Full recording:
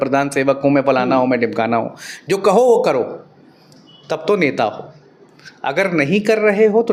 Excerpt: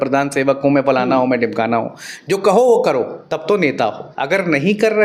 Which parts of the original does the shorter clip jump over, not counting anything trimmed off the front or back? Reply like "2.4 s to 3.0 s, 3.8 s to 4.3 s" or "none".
3.2 s to 4.0 s, 4.8 s to 5.5 s